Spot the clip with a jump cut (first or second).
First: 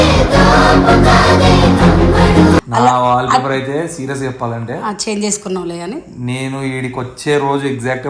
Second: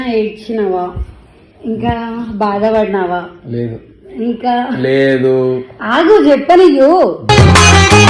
first